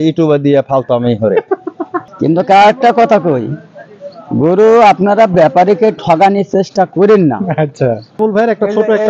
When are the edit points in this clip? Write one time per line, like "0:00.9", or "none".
0:02.0
0:08.2